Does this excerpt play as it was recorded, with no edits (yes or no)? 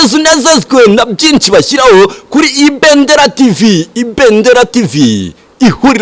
yes